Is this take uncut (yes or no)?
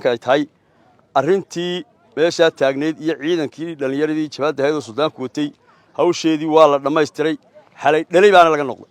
yes